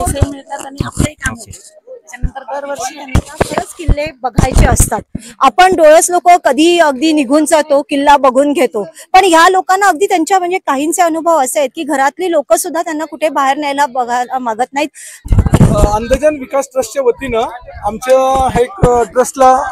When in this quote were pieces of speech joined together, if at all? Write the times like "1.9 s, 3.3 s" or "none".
3.1 s, 15.1 s